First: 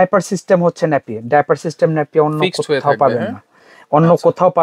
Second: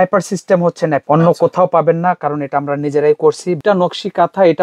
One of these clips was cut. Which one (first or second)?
second